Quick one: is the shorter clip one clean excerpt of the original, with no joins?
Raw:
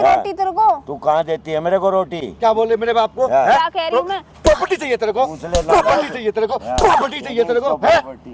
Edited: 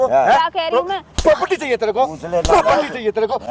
yes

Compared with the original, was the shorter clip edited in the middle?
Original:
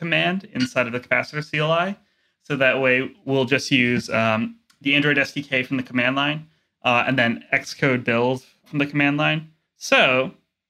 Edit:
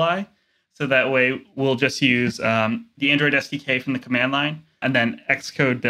yes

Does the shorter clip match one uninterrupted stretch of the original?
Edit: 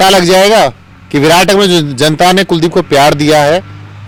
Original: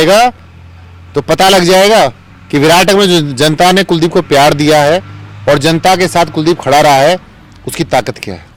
yes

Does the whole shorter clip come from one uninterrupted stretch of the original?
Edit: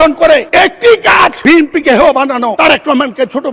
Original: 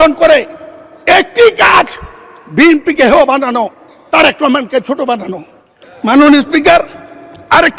no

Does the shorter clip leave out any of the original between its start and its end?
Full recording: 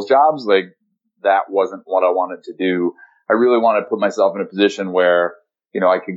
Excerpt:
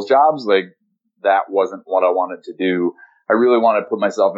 no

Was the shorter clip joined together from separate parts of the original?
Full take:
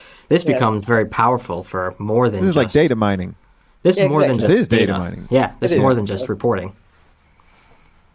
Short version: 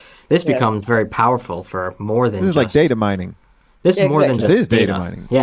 no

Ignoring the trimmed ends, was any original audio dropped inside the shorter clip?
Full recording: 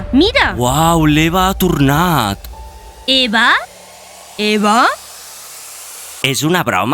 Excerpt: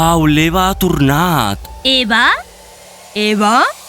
yes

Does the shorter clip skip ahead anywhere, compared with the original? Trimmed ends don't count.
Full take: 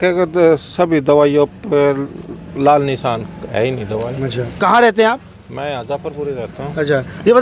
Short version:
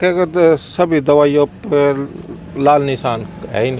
no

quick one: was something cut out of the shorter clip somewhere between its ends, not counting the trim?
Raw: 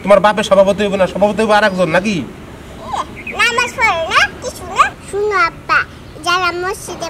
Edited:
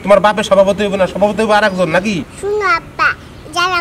yes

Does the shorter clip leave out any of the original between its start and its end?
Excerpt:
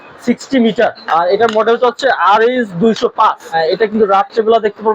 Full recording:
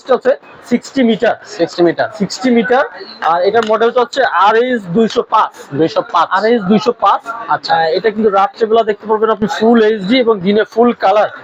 yes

